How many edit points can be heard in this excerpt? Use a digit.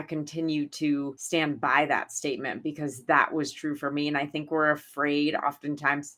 1